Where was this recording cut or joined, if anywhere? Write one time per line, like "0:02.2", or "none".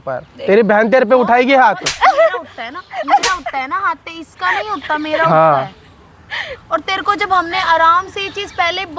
none